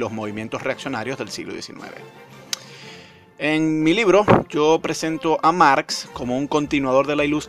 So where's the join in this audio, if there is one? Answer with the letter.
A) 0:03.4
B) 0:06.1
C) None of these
C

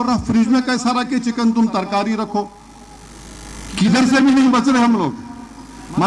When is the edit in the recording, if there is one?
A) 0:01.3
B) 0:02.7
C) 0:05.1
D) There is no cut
D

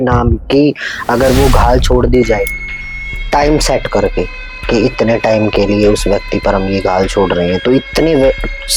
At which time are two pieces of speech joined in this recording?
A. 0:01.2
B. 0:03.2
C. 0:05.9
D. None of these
D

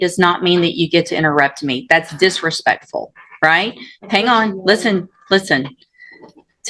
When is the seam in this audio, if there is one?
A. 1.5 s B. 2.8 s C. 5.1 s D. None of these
D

